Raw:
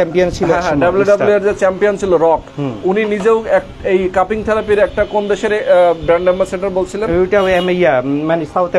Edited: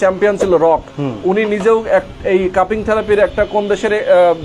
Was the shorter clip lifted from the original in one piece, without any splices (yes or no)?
yes